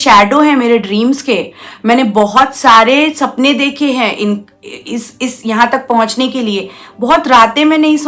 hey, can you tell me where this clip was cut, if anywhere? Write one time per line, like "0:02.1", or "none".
none